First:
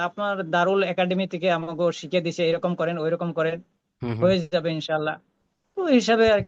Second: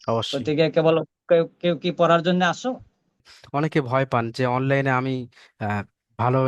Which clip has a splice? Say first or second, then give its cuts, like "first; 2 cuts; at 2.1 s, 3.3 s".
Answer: second; 1 cut; at 3.3 s